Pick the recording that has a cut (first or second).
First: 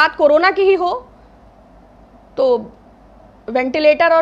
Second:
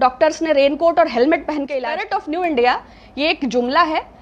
second